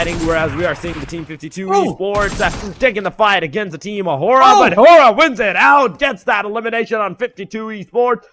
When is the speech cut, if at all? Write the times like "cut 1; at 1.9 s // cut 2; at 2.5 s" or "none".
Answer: none